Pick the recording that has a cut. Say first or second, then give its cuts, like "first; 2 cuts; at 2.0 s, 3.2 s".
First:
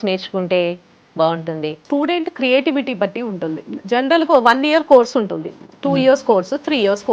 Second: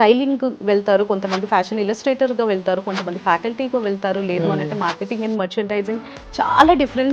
first; 1 cut; at 1.8 s